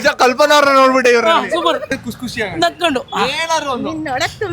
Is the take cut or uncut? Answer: cut